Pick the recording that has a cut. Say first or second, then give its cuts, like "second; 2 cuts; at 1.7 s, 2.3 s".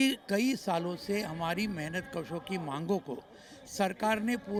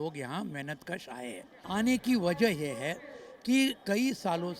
second; 1 cut; at 1.5 s